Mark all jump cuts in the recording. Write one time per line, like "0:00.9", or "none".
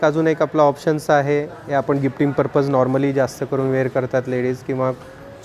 none

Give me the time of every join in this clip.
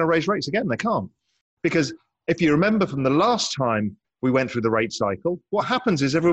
0:04.0

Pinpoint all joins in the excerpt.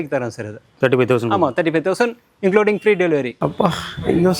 0:03.3

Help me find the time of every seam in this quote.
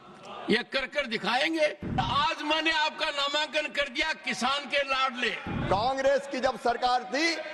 0:02.0
0:05.5

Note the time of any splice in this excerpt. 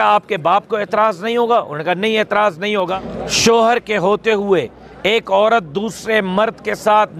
0:02.9

